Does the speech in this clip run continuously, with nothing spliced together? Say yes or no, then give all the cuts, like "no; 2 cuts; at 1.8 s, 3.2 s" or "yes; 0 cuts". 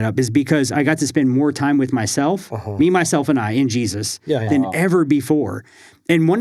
yes; 0 cuts